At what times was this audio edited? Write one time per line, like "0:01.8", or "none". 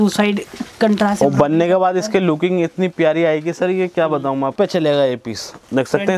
0:04.5